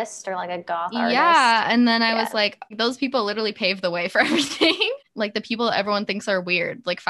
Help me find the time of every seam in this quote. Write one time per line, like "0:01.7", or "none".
0:02.7
0:05.0